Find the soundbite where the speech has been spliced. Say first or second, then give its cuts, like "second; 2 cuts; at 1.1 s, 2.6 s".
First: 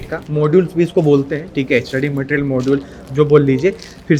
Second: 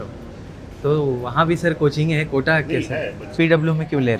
second; 1 cut; at 3.2 s